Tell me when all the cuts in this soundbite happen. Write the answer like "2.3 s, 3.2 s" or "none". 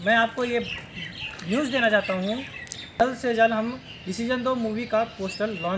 3.0 s